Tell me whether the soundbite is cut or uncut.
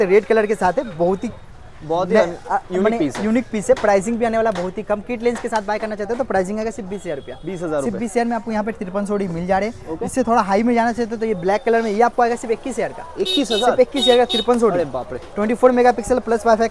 uncut